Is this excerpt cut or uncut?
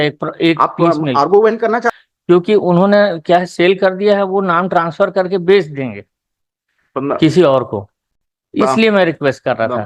cut